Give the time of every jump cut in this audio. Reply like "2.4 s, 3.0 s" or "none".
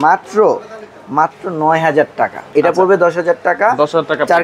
2.4 s